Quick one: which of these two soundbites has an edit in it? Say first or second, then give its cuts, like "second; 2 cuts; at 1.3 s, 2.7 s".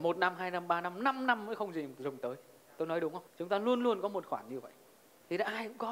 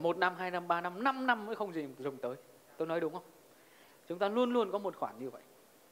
first; 1 cut; at 3.3 s